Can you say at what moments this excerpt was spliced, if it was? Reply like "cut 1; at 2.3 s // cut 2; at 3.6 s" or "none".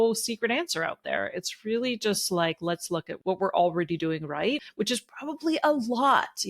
cut 1; at 3.1 s // cut 2; at 4.7 s

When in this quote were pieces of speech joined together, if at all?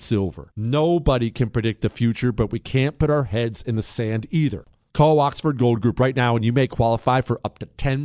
cut 1; at 4.6 s

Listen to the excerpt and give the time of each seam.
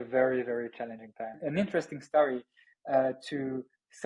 cut 1; at 1.3 s

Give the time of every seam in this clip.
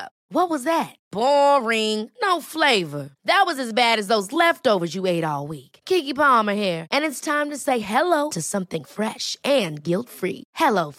none

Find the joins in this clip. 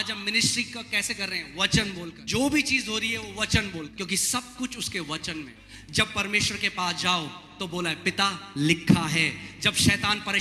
cut 1; at 2.2 s // cut 2; at 3.9 s // cut 3; at 5.6 s

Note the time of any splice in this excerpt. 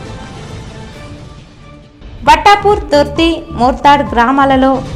none

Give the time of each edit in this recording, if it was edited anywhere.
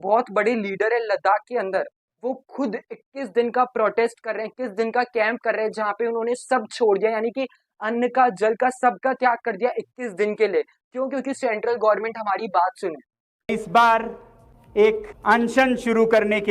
cut 1; at 2.0 s

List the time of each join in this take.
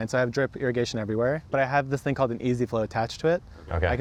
none

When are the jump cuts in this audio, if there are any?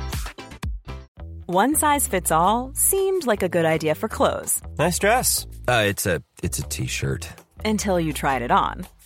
cut 1; at 1.1 s

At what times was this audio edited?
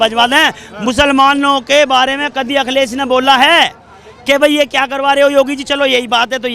none

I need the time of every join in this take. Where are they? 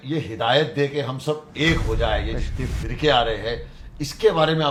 none

